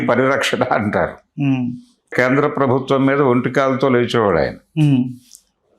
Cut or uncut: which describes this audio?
cut